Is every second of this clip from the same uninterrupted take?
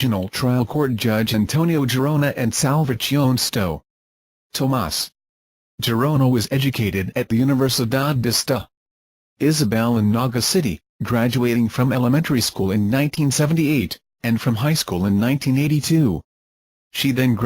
no; 1 cut; at 6.0 s

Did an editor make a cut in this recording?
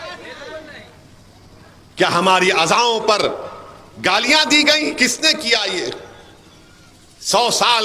no; 0 cuts

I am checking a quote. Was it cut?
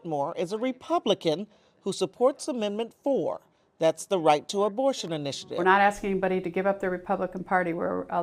yes; 1 cut; at 5.4 s

